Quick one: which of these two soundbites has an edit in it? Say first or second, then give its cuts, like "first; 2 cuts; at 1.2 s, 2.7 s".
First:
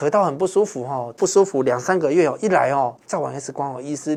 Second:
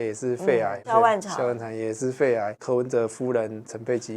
second; 2 cuts; at 0.8 s, 2.6 s